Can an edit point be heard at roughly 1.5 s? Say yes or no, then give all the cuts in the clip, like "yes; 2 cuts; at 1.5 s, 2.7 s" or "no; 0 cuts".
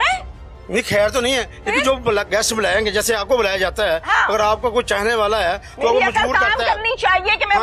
no; 0 cuts